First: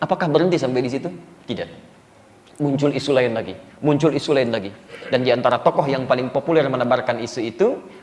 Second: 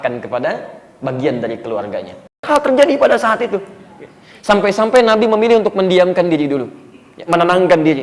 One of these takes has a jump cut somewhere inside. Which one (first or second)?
second